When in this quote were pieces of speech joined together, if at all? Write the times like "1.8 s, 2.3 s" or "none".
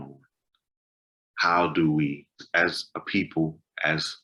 2.4 s